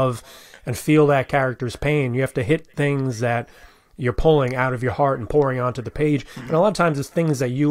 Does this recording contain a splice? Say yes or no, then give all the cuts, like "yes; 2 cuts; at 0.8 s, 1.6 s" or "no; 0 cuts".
no; 0 cuts